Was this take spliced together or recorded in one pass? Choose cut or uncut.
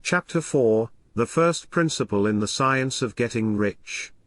cut